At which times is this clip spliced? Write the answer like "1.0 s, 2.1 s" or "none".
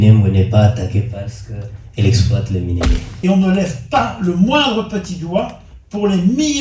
3.1 s